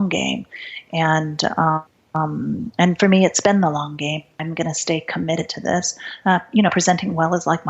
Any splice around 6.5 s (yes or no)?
no